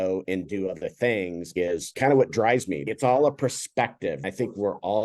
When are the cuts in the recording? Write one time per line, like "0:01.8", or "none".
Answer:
0:01.5
0:02.9
0:04.2